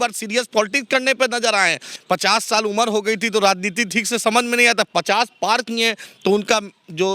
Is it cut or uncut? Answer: cut